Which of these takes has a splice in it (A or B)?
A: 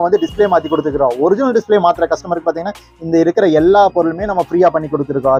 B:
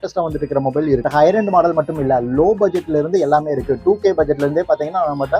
B